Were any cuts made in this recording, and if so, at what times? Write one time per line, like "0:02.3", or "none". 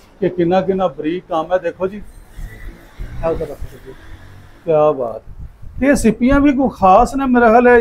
none